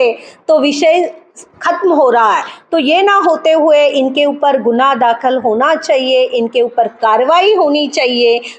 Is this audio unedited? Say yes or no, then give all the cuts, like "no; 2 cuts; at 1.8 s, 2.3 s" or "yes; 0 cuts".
yes; 0 cuts